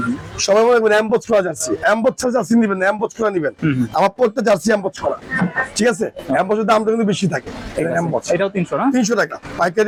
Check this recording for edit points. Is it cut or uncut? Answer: uncut